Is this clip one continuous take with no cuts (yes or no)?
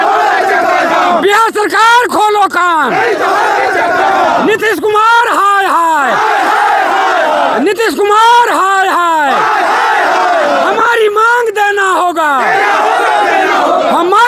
yes